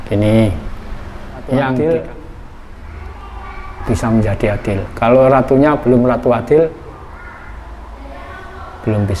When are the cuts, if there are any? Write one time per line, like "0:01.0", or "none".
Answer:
0:01.7